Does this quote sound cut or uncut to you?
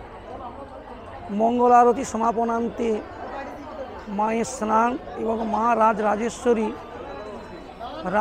uncut